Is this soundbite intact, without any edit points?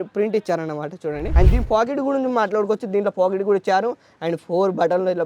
no; 1 cut; at 1.3 s

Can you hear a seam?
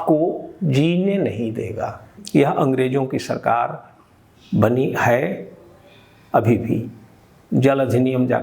yes; 1 cut; at 2.2 s

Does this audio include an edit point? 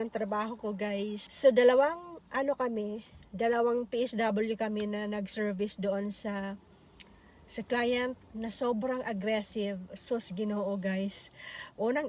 yes; 1 cut; at 1.2 s

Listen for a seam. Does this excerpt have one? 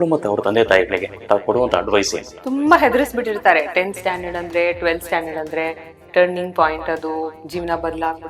yes; 1 cut; at 2.3 s

